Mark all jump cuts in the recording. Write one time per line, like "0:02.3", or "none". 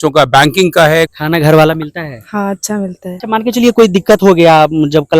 0:01.2
0:03.2